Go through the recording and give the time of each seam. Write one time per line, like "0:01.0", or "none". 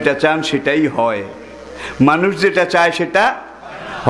none